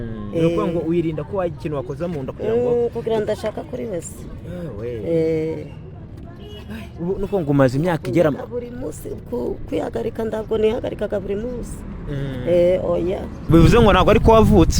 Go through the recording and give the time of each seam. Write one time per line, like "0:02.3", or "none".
0:13.5